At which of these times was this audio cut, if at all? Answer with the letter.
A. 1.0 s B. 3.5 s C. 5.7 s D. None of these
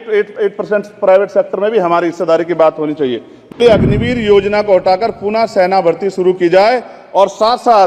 B